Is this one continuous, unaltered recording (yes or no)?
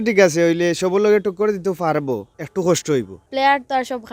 no